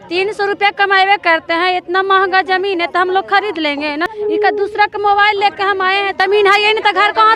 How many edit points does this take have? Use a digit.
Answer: 2